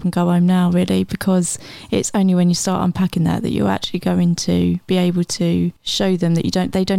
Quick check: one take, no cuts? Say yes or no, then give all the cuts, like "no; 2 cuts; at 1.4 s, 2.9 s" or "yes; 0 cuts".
no; 1 cut; at 5.8 s